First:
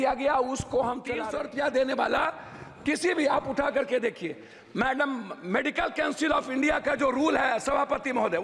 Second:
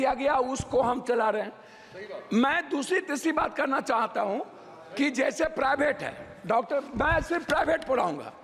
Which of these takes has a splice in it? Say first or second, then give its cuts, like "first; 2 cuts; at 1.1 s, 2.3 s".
first; 1 cut; at 1.2 s